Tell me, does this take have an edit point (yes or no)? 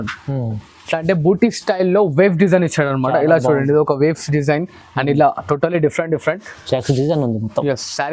no